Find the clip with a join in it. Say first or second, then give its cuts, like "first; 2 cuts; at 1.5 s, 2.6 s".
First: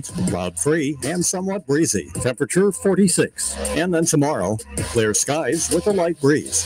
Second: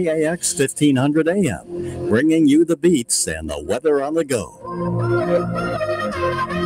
second; 1 cut; at 4.6 s